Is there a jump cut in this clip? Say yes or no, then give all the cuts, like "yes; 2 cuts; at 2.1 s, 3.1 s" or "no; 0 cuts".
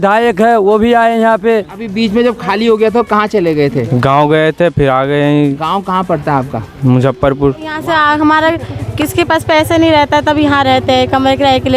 yes; 2 cuts; at 1.8 s, 7.8 s